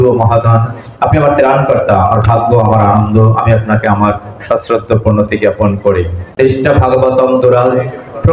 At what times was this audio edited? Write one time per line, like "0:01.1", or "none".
0:06.2